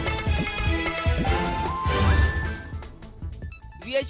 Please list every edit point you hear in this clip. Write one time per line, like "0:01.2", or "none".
0:02.1